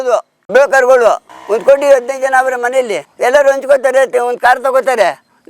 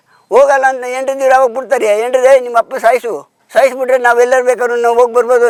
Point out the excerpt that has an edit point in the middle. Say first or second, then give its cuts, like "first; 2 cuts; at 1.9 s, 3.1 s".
first; 2 cuts; at 1.3 s, 3.0 s